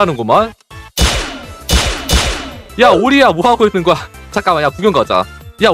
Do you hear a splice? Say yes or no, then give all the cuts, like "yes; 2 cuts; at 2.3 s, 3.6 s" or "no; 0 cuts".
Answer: no; 0 cuts